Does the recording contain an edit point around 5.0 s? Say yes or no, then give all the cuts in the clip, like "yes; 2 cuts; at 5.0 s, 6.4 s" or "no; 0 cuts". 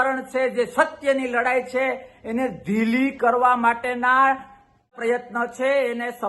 yes; 1 cut; at 5.0 s